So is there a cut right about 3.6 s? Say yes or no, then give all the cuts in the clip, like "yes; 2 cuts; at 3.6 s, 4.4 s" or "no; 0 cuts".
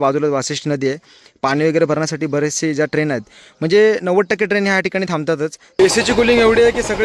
no; 1 cut; at 5.8 s